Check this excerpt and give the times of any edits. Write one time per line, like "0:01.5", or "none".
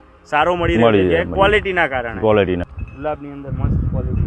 0:02.7

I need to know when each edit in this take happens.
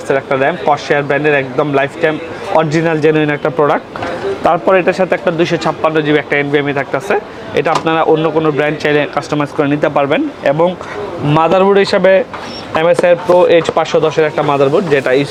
none

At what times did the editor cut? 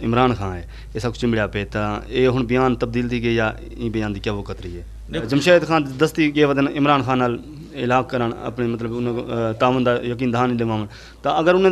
0:05.2

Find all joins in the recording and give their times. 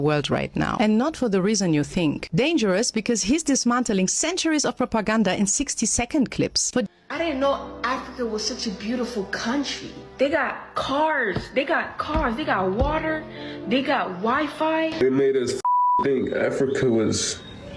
none

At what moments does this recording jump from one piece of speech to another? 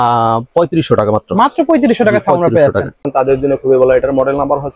0:02.9

